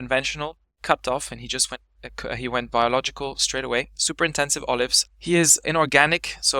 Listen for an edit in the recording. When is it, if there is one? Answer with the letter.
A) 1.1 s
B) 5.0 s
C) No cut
B